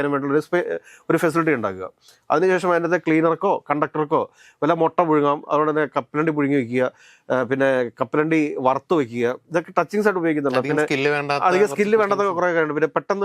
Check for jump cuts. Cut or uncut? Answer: uncut